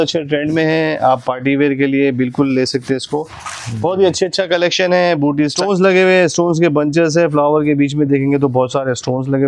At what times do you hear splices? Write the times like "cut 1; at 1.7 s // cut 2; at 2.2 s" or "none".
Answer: cut 1; at 5.5 s